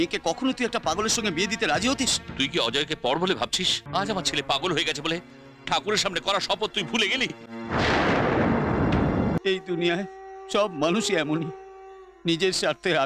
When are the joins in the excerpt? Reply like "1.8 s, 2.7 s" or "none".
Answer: 3.8 s, 9.4 s